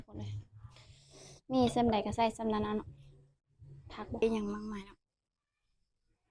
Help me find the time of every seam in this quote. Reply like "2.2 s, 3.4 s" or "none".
4.2 s